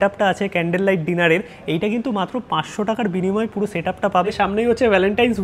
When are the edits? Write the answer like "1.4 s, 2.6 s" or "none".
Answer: 4.3 s